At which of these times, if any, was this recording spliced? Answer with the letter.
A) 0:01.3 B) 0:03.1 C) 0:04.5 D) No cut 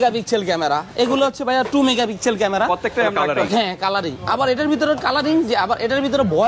B